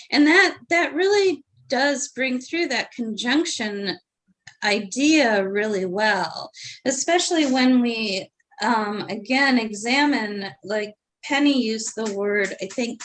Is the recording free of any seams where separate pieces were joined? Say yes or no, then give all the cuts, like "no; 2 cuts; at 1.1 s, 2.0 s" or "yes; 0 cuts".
yes; 0 cuts